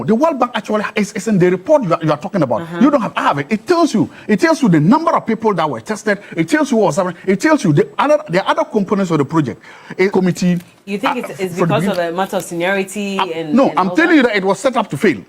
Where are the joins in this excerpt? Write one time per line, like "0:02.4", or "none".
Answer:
0:10.1